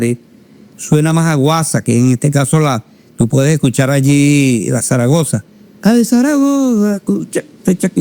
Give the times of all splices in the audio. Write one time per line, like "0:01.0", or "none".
none